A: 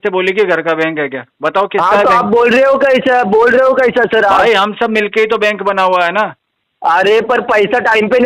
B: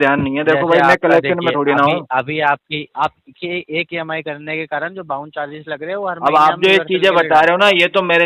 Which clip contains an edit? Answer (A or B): B